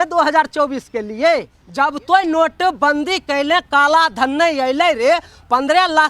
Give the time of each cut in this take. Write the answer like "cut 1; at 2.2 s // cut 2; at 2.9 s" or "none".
cut 1; at 1.6 s